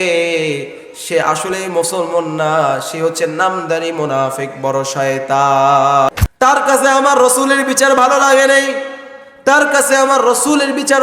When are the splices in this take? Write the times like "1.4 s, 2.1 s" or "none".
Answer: 6.1 s